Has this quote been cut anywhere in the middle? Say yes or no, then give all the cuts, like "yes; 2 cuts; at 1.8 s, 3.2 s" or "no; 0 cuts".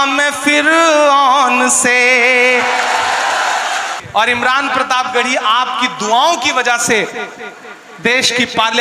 yes; 1 cut; at 3.9 s